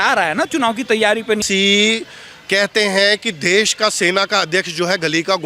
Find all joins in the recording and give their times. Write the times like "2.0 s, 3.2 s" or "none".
1.4 s